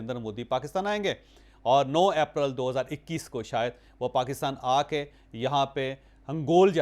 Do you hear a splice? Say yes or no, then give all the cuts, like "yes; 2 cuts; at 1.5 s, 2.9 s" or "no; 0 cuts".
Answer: no; 0 cuts